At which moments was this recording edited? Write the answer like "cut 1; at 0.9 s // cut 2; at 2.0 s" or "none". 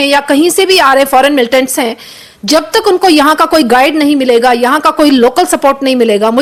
none